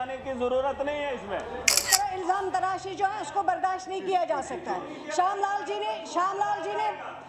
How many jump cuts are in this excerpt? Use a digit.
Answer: 1